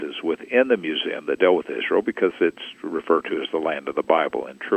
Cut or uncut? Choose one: uncut